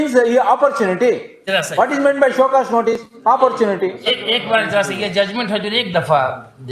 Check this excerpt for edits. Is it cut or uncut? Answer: uncut